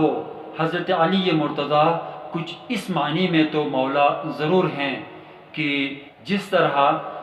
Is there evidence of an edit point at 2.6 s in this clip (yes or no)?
no